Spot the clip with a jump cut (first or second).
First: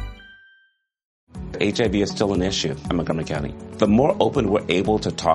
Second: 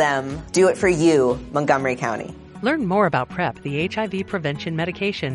first